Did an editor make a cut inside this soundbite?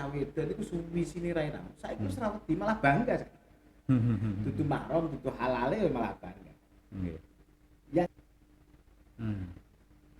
yes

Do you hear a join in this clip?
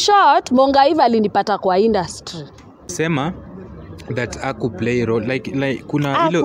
yes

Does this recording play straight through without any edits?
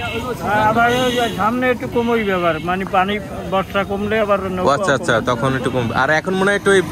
yes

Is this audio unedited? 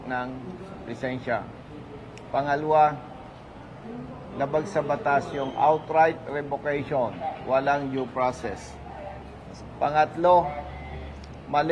yes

